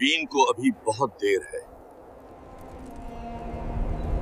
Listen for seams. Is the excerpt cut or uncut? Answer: uncut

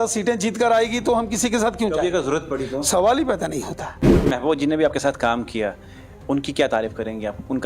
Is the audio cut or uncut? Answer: cut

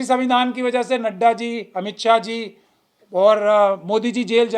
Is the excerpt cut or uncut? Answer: uncut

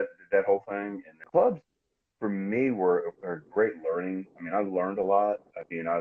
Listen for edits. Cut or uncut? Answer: cut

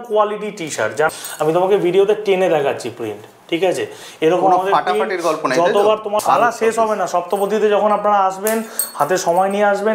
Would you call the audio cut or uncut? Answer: cut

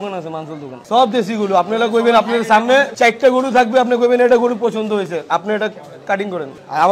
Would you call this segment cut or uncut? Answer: cut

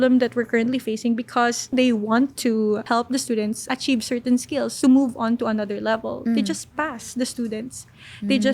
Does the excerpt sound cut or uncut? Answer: cut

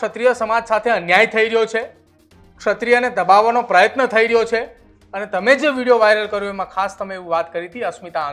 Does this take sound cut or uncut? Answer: uncut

